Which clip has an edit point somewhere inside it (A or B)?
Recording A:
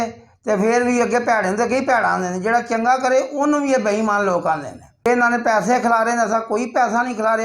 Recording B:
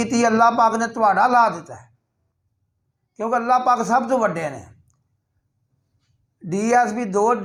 A